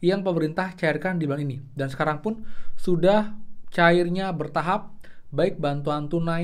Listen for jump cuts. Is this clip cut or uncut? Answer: uncut